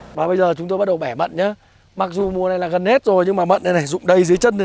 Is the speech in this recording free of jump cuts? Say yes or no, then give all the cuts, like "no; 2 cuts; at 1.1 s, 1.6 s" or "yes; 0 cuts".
yes; 0 cuts